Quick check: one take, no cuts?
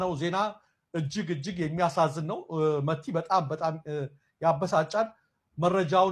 yes; 0 cuts

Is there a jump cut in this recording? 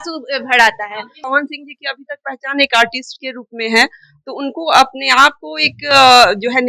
yes; 1 cut; at 1.3 s

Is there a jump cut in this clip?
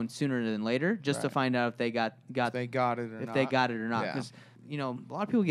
yes; 1 cut; at 4.5 s

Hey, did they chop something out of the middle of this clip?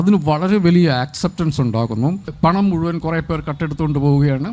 yes; 1 cut; at 2.3 s

